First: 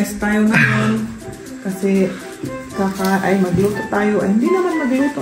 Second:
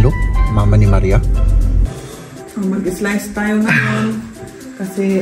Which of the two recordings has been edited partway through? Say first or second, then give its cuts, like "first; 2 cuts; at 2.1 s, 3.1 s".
second; 1 cut; at 1.9 s